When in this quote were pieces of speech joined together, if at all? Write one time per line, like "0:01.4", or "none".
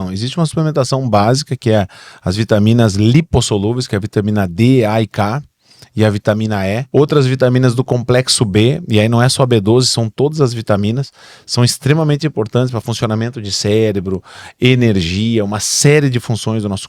0:06.8